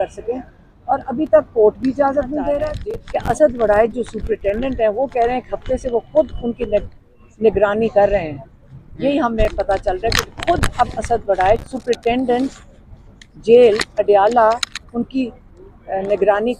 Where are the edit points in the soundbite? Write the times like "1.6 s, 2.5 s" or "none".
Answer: 2.7 s